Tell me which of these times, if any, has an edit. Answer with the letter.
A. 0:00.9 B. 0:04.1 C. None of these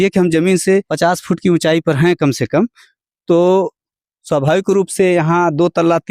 A